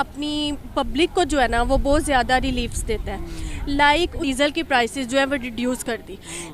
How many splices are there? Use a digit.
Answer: 0